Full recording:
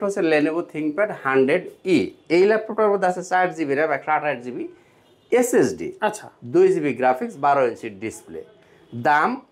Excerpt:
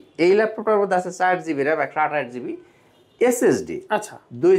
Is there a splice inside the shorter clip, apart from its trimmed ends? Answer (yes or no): no